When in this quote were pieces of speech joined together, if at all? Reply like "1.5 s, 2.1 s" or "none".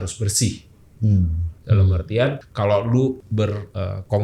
1.5 s, 2.4 s, 3.4 s